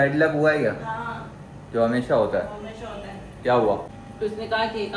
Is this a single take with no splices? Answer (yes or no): no